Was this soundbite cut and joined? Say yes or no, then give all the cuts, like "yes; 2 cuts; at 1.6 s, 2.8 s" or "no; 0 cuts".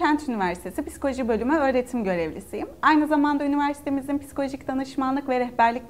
no; 0 cuts